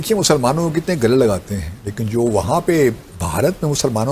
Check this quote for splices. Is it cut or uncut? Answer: uncut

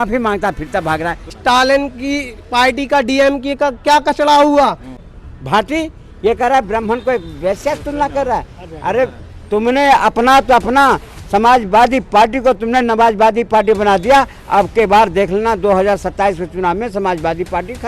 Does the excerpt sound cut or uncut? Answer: cut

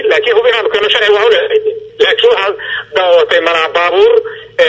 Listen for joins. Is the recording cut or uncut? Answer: cut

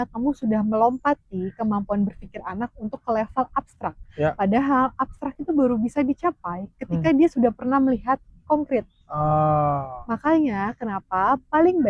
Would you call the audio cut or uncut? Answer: uncut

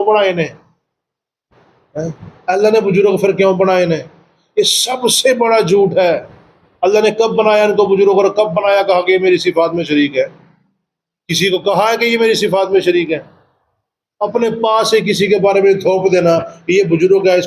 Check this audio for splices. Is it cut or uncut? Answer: uncut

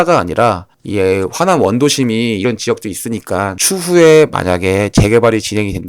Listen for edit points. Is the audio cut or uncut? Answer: cut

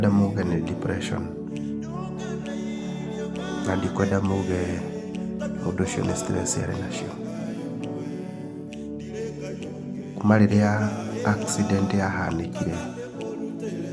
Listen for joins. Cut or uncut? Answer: uncut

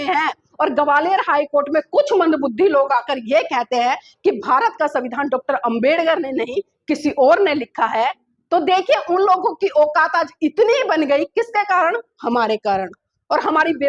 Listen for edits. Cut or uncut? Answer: uncut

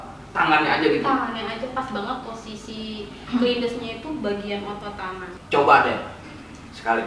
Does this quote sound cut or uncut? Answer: cut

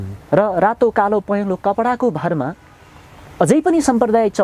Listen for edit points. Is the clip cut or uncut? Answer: uncut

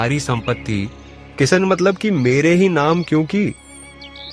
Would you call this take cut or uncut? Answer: uncut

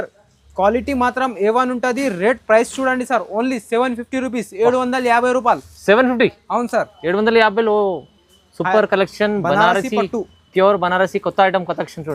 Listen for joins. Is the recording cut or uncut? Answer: uncut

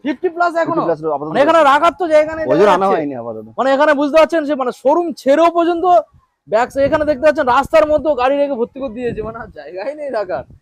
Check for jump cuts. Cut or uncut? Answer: uncut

